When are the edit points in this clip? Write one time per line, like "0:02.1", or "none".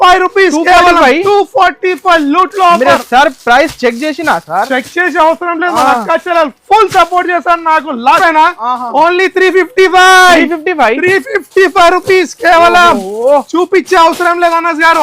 0:08.2